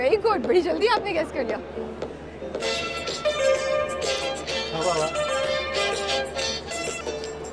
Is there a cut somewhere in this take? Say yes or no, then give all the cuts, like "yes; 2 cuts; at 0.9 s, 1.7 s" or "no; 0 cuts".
no; 0 cuts